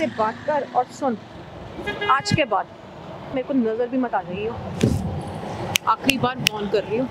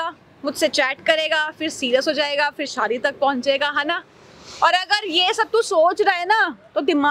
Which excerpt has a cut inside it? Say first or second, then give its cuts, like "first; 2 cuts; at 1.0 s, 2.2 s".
first; 1 cut; at 3.3 s